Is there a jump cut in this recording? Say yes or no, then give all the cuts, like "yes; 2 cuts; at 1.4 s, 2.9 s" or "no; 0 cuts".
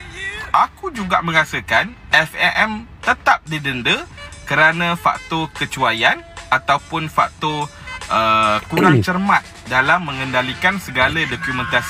no; 0 cuts